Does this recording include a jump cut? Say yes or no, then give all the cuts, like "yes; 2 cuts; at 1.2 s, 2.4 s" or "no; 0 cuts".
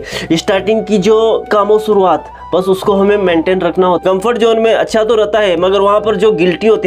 yes; 2 cuts; at 1.5 s, 4.0 s